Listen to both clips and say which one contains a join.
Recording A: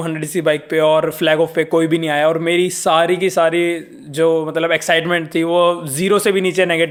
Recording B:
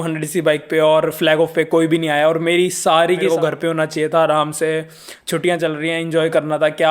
B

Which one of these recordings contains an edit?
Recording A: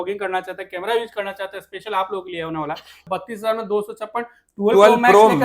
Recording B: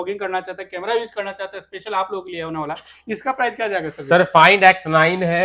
A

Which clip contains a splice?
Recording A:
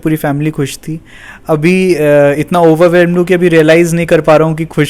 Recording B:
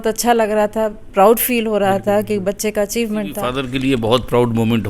B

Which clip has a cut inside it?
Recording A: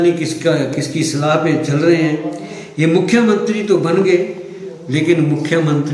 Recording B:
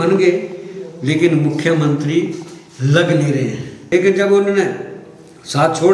B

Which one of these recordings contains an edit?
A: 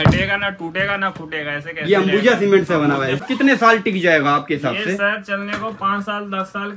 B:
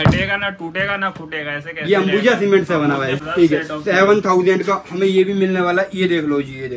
A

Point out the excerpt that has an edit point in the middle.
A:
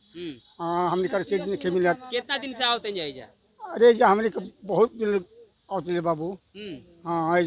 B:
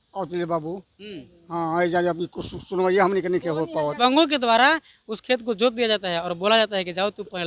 B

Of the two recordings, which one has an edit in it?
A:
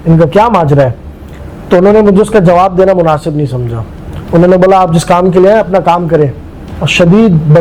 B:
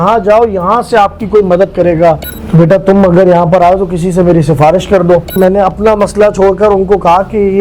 B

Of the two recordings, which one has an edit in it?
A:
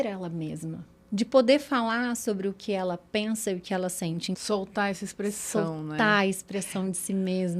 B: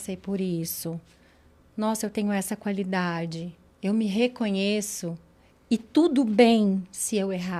A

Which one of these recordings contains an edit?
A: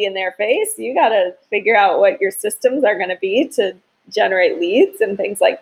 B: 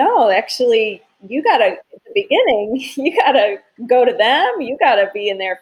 B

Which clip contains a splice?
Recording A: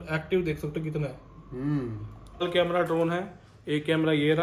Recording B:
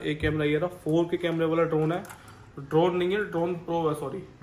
A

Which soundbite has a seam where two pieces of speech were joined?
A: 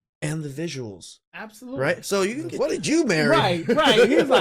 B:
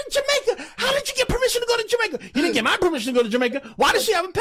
A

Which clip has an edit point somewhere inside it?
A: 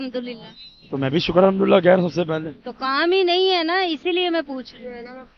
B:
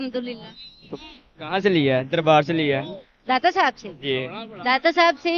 B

